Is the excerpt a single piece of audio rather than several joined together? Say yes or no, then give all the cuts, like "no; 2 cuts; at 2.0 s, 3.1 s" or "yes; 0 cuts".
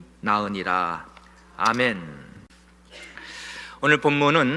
no; 1 cut; at 2.5 s